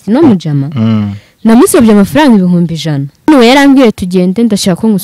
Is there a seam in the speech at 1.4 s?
no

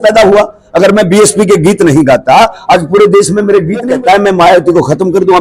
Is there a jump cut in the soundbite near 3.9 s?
yes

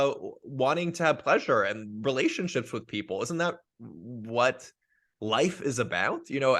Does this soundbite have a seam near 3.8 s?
no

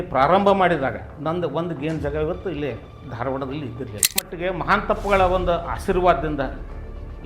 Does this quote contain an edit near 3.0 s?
no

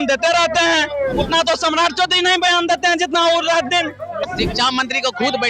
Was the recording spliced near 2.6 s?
no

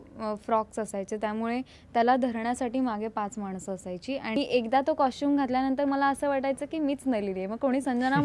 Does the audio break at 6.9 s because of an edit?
no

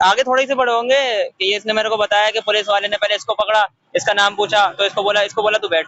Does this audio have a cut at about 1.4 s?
no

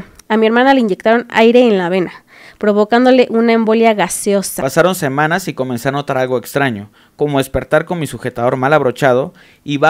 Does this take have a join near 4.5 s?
yes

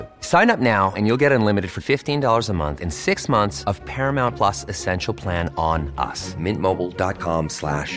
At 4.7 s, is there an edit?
no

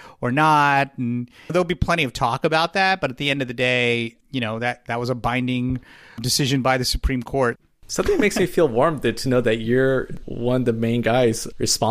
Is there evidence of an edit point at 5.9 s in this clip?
no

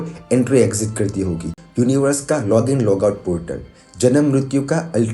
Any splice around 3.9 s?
no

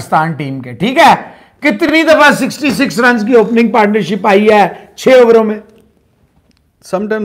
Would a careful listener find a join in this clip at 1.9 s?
no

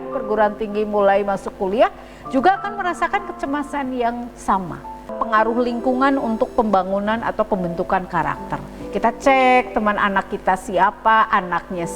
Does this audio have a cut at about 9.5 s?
no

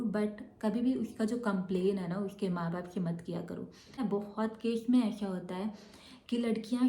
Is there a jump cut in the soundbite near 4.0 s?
yes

